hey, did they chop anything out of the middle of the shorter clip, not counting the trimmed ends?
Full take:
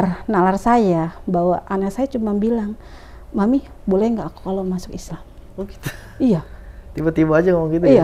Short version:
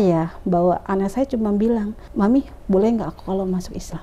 yes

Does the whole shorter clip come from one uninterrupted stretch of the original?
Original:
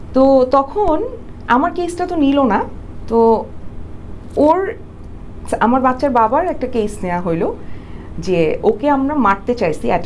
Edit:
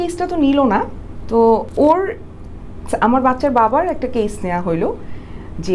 no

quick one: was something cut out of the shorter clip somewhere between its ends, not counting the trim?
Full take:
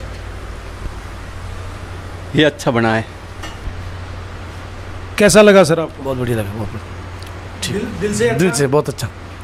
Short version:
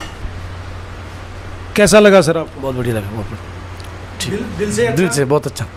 no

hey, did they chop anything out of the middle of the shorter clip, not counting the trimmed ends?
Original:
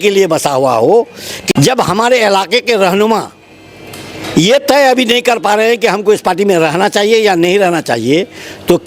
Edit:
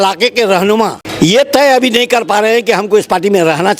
yes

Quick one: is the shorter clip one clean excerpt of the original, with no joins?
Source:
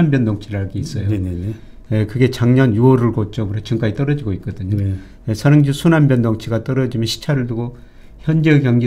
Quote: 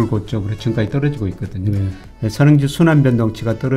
yes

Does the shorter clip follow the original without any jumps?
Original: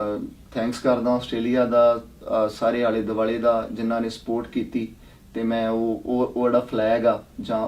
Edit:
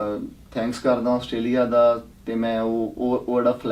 no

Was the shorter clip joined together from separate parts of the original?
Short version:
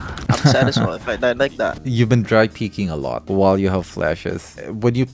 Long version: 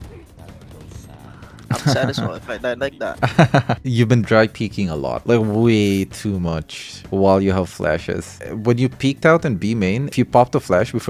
yes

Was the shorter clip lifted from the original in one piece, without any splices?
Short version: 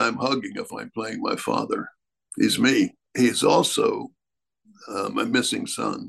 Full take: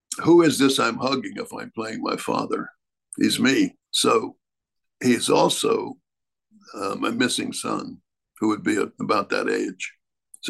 no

